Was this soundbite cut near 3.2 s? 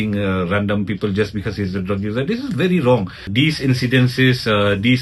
yes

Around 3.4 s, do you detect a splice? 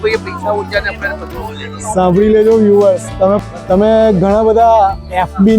yes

